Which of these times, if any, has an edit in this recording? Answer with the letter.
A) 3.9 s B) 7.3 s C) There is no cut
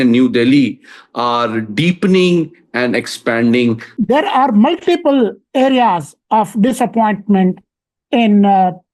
A